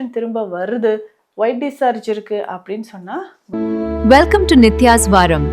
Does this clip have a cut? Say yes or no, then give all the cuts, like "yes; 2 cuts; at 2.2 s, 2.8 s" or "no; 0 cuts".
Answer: yes; 1 cut; at 3.4 s